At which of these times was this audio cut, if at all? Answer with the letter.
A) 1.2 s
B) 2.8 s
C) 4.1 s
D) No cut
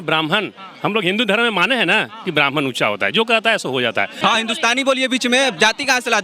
C